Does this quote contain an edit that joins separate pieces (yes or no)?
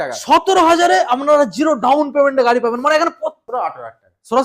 yes